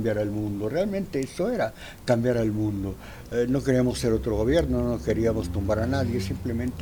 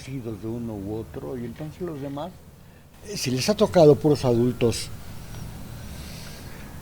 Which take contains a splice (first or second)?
second